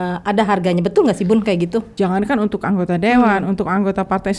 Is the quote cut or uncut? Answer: cut